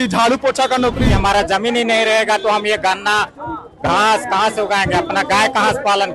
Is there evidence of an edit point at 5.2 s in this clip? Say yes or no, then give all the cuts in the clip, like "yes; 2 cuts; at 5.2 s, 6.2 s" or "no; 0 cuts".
no; 1 cut; at 1.1 s